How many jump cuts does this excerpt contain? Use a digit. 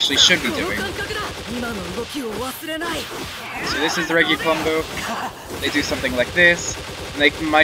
0